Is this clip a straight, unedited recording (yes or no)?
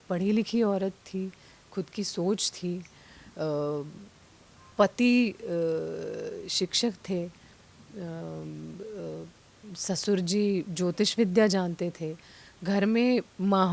yes